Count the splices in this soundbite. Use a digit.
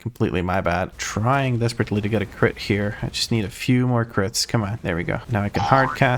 1